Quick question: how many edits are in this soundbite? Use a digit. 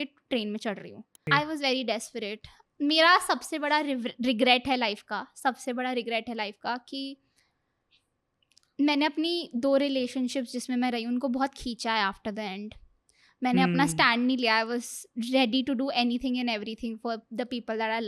1